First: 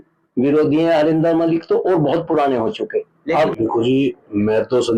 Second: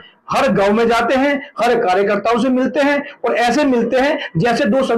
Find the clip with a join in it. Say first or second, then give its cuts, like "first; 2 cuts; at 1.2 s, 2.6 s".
first; 1 cut; at 3.5 s